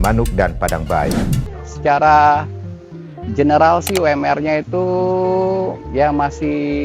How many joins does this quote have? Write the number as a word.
one